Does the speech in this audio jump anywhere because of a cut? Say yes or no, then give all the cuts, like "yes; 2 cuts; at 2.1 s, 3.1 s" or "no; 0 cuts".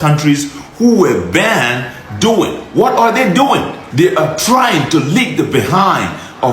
yes; 1 cut; at 3.8 s